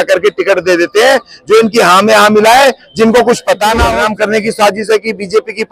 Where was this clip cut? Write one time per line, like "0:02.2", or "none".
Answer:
0:03.9